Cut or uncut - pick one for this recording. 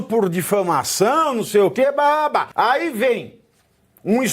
cut